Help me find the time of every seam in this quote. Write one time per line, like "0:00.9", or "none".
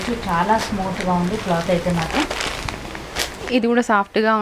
0:03.5

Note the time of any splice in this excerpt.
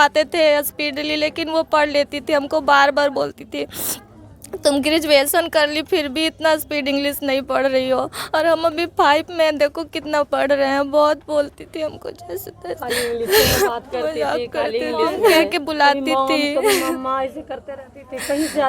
0:15.4

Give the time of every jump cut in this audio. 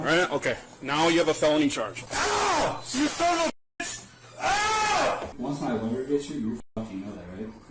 0:02.0
0:05.3

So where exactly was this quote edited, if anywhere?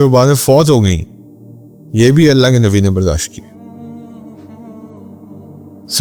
none

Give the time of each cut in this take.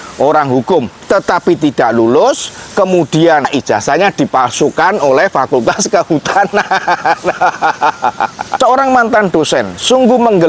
0:03.5
0:08.4

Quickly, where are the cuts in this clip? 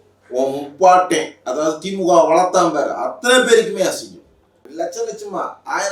0:04.5

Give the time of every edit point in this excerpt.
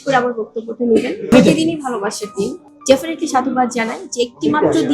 0:01.2
0:02.5

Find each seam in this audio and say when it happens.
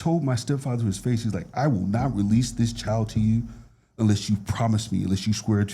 none

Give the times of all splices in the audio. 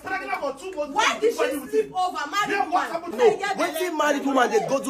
0:03.1

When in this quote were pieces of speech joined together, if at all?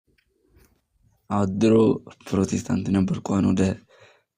none

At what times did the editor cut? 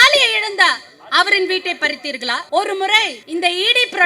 0:02.4
0:03.2

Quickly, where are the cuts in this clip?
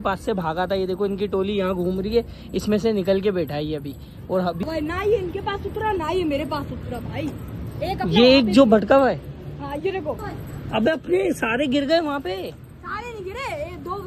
0:04.6
0:10.2

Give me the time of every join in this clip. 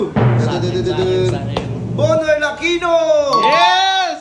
none

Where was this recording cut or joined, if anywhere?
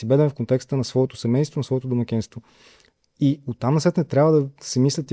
none

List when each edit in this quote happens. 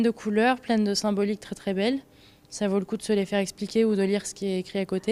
none

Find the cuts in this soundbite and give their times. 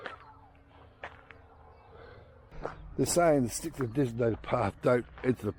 0:02.5

